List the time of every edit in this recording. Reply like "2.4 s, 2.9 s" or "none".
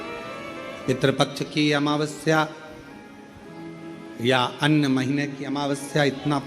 none